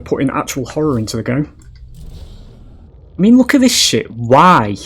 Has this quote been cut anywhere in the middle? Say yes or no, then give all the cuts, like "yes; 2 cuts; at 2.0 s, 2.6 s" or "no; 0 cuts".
yes; 1 cut; at 2.9 s